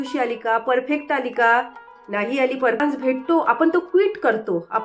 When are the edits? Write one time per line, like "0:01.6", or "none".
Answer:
0:02.8